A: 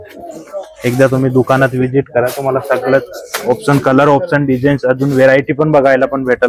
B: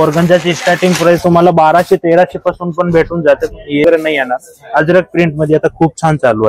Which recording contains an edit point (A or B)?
B